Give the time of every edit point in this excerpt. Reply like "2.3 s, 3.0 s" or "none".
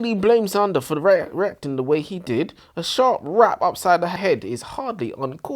4.1 s